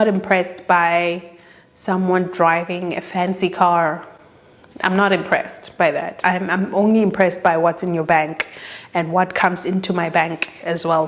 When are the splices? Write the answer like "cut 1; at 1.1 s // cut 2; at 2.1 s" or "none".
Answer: none